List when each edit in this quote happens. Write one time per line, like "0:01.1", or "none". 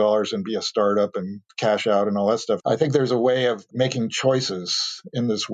0:02.6